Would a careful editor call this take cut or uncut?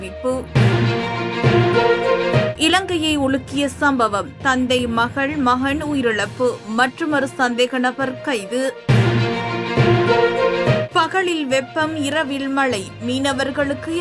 uncut